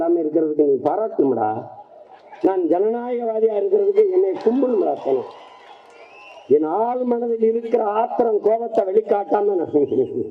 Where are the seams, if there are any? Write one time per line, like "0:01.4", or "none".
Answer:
none